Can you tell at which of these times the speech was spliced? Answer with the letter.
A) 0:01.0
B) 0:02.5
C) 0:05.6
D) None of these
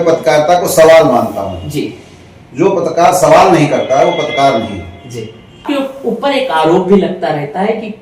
C